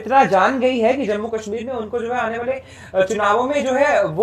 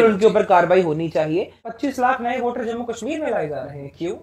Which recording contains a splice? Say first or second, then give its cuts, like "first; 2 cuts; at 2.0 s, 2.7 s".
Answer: second; 1 cut; at 1.7 s